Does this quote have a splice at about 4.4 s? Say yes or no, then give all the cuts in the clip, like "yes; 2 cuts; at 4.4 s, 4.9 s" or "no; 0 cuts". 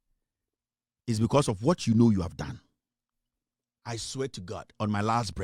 no; 0 cuts